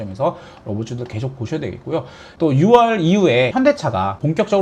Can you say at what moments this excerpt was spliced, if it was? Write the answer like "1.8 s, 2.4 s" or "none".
2.2 s